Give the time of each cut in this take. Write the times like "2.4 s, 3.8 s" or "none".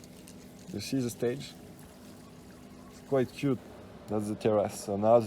3.6 s